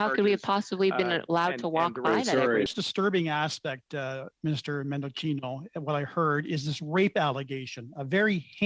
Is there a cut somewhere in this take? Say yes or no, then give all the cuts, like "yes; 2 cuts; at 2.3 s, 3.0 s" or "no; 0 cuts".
yes; 1 cut; at 2.7 s